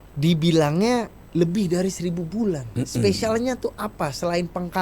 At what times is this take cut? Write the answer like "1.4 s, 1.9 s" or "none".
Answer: 1.2 s